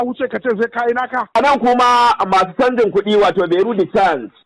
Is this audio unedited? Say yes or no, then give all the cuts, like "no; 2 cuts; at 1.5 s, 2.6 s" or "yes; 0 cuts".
no; 1 cut; at 1.4 s